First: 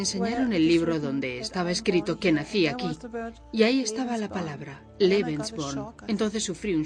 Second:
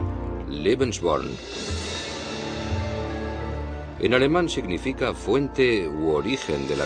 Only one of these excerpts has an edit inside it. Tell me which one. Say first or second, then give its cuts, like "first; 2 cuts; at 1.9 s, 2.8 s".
first; 1 cut; at 2.0 s